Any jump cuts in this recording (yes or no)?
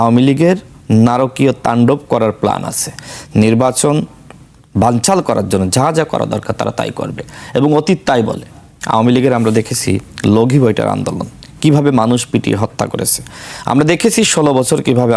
no